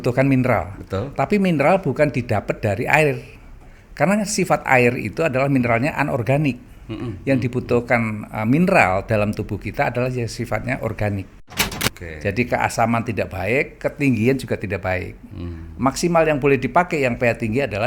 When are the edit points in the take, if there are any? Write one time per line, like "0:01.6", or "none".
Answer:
0:11.7